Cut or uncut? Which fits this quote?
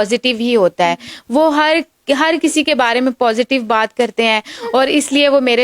uncut